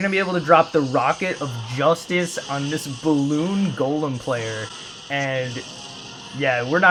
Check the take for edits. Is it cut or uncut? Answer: uncut